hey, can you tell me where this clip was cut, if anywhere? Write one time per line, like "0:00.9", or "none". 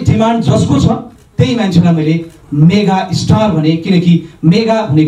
none

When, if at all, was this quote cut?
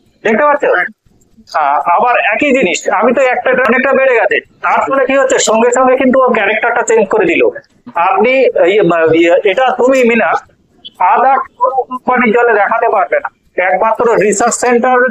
0:03.7

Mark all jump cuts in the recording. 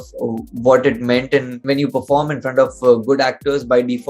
0:01.6

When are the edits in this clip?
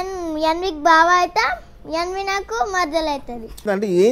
none

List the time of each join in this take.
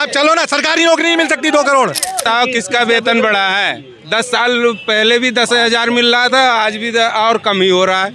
0:02.3

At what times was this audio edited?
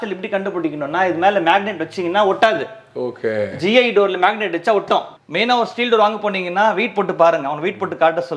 0:05.2

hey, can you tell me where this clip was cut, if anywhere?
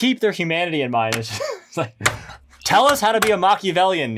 none

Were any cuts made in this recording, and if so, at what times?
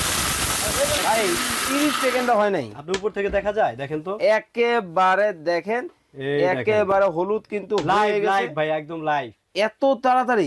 0:01.0

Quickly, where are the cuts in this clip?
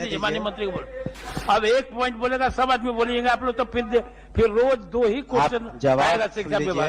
none

